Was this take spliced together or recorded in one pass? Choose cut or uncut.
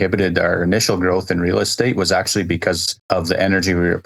cut